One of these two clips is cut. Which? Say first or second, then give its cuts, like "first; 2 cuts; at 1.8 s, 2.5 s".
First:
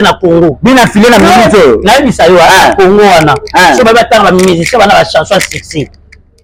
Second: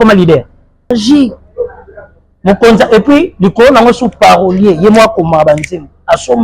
second; 1 cut; at 0.9 s